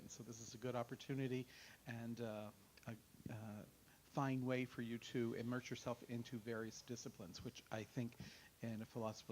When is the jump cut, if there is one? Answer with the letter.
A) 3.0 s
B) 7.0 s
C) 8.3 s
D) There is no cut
C